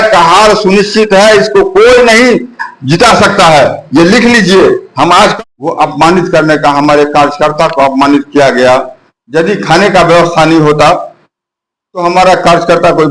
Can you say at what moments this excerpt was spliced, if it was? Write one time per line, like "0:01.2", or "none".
0:05.3